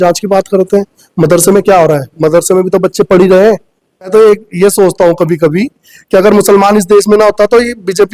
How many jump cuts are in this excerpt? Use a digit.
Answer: 1